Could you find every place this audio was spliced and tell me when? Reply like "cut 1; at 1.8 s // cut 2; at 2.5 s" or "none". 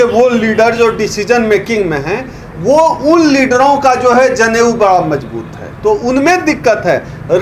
none